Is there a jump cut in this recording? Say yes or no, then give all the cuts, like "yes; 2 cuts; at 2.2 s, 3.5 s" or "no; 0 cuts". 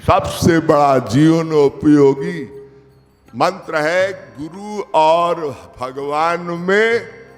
no; 0 cuts